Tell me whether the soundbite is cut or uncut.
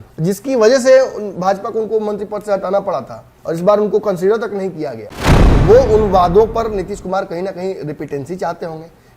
cut